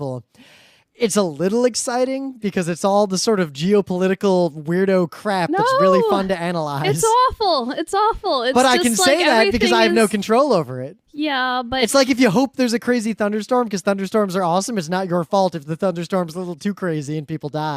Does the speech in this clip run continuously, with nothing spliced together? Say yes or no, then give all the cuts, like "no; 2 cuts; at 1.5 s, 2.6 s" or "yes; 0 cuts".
no; 1 cut; at 3.6 s